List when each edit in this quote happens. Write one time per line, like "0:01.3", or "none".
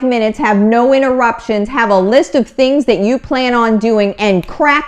none